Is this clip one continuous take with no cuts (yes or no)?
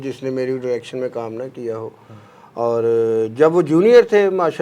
yes